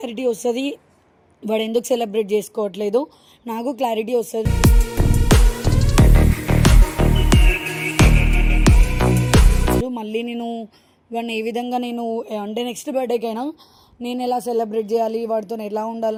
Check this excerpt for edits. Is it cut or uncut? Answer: uncut